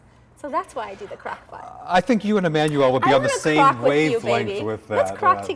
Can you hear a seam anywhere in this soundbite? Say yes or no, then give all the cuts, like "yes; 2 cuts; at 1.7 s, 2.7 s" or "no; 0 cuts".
no; 0 cuts